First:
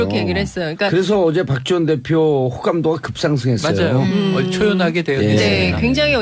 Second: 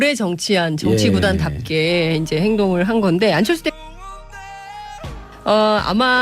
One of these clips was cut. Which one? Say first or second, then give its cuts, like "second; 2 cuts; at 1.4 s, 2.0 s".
second; 1 cut; at 3.6 s